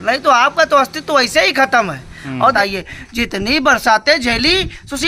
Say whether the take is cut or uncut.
cut